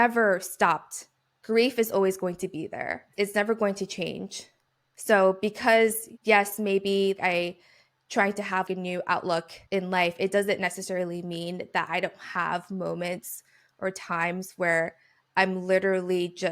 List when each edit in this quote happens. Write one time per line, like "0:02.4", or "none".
0:06.1